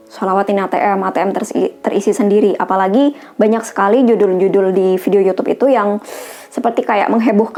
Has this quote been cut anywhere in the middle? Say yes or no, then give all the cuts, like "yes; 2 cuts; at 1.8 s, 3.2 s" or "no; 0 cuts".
no; 0 cuts